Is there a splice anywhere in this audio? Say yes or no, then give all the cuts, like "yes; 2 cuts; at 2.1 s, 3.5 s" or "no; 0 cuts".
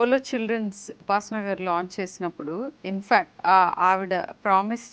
yes; 2 cuts; at 1.0 s, 3.3 s